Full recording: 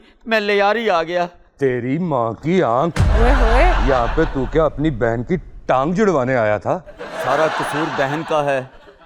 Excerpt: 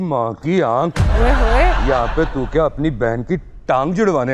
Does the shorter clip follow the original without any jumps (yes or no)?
yes